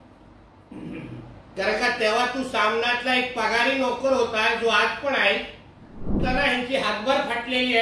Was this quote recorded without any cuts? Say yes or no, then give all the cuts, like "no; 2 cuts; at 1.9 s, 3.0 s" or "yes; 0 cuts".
no; 1 cut; at 6.2 s